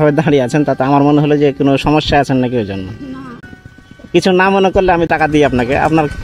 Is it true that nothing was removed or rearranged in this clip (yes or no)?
no